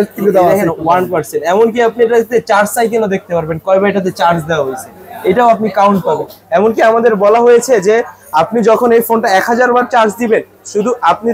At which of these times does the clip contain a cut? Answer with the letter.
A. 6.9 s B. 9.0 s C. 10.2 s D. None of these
D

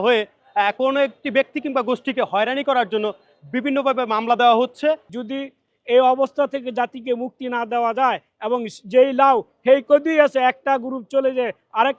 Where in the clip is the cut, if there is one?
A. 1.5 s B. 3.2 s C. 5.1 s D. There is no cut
C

